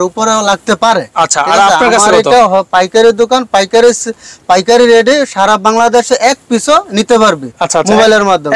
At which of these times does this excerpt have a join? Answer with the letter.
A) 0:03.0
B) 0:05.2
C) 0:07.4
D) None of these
D